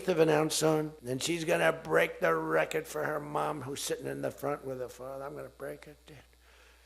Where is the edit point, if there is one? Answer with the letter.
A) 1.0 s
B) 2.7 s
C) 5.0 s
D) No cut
A